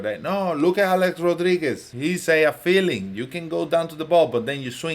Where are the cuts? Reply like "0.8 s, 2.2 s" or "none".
1.9 s